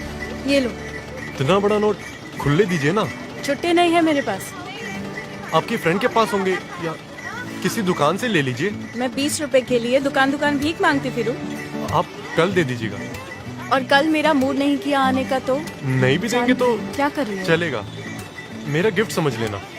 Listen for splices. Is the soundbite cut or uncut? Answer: cut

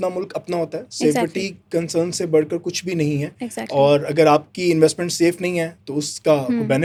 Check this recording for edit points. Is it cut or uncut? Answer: uncut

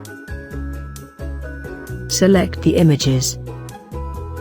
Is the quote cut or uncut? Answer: cut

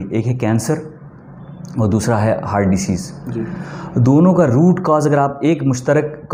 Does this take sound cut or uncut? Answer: uncut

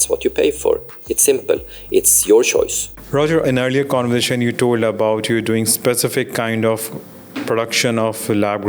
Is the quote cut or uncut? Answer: uncut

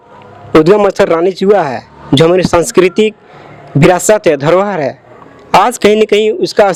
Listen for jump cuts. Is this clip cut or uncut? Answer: uncut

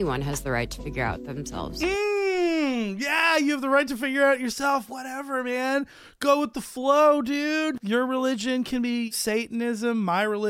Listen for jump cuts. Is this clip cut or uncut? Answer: cut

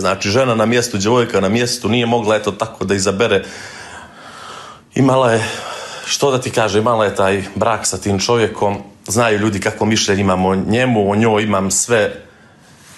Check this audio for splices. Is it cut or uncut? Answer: uncut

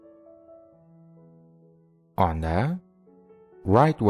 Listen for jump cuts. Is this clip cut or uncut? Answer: uncut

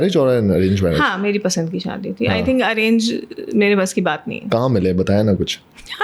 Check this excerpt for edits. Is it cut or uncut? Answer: uncut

